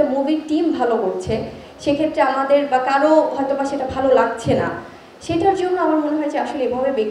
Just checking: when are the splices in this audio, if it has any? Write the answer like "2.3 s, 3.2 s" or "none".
none